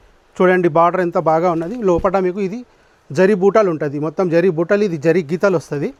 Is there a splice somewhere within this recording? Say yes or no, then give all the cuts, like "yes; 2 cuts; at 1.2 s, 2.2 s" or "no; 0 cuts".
no; 0 cuts